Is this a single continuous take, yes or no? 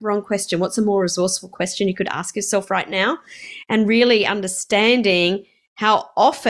yes